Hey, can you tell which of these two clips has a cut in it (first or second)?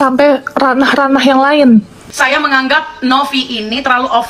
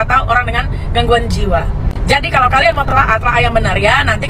first